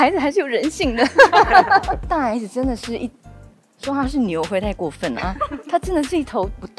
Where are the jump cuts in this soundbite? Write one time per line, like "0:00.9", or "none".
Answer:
0:02.0